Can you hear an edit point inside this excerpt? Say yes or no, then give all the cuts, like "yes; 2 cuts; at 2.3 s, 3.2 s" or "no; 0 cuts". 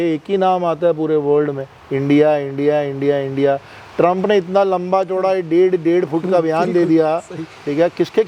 no; 0 cuts